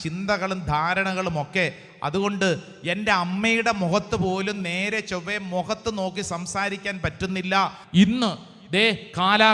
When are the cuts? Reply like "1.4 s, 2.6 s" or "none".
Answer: 7.8 s